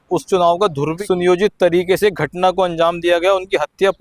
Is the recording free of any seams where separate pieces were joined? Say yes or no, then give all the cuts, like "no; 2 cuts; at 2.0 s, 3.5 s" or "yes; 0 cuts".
no; 1 cut; at 1.0 s